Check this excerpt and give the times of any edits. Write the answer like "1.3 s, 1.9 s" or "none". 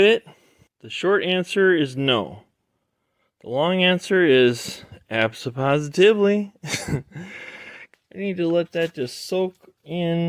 7.9 s